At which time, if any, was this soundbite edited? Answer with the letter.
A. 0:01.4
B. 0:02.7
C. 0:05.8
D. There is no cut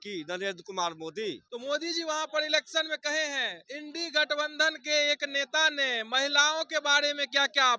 A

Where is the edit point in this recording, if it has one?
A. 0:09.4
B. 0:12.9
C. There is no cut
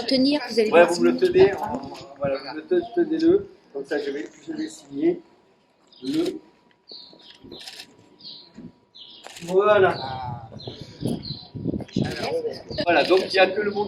B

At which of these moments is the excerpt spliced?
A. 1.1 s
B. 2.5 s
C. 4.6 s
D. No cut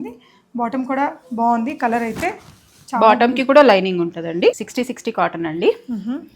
C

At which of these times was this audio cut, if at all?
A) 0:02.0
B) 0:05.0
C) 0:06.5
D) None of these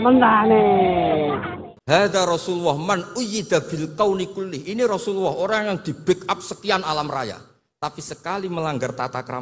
A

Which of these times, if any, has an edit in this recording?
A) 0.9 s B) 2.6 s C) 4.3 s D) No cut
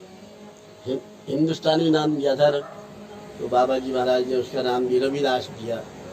B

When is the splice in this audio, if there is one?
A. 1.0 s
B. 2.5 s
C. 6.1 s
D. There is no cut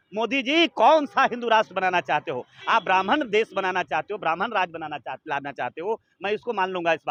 D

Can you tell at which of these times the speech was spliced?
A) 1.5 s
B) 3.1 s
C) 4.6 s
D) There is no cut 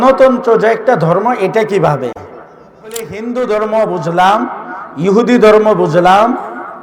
B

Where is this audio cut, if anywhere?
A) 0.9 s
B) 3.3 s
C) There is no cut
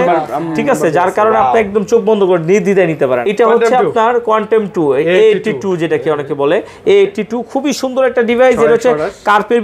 B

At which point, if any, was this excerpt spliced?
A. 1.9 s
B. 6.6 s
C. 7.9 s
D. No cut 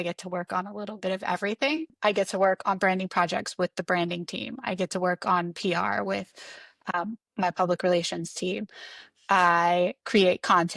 A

